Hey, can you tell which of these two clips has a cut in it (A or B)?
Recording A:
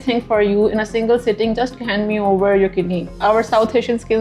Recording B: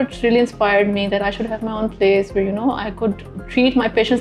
A